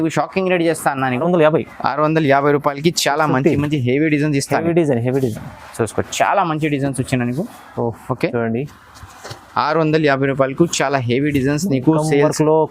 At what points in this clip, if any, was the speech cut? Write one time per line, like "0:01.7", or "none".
0:01.2

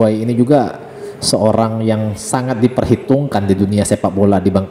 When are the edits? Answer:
none

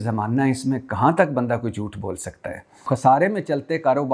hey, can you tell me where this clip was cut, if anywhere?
0:02.9

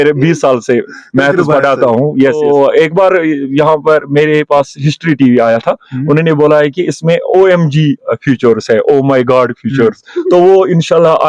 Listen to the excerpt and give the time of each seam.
0:02.4

